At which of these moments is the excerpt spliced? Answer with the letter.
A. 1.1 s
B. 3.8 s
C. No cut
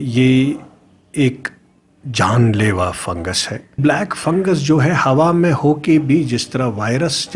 B